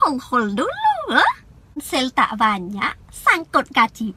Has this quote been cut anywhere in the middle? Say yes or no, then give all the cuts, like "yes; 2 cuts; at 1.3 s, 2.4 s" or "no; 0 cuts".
no; 0 cuts